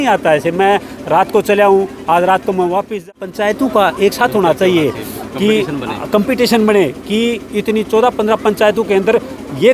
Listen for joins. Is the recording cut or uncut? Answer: cut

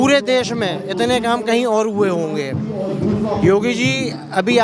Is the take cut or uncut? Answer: uncut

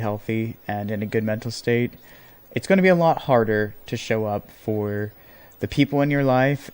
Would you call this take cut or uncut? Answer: uncut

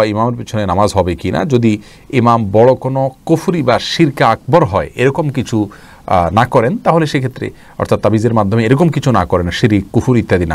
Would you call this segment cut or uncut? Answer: uncut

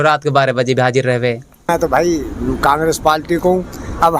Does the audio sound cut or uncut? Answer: cut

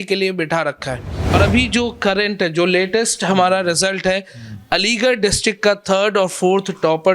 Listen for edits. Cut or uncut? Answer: cut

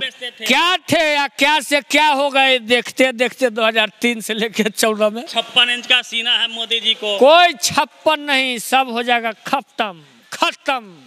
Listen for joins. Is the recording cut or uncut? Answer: cut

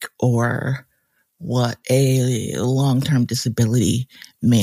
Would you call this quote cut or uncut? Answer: uncut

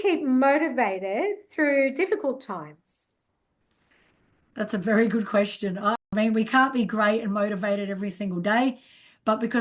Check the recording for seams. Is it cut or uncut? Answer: cut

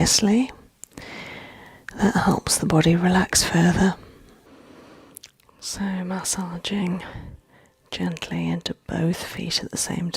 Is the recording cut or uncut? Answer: cut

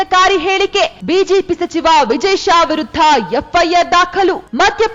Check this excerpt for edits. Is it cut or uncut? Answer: uncut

